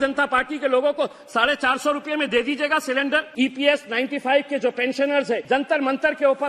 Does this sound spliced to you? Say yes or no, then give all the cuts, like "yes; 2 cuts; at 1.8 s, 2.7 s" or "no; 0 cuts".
yes; 2 cuts; at 3.3 s, 5.4 s